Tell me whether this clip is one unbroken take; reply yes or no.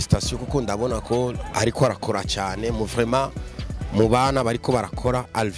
yes